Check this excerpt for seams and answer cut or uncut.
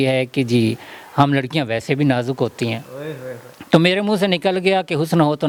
uncut